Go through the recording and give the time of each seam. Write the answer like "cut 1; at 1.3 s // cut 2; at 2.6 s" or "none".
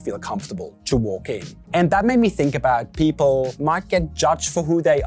cut 1; at 1.5 s // cut 2; at 3.5 s